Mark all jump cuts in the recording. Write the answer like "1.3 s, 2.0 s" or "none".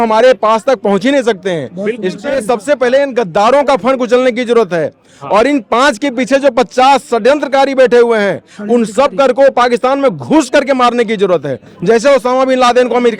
none